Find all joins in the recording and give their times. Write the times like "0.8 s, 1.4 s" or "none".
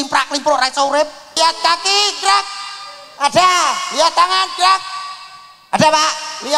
1.3 s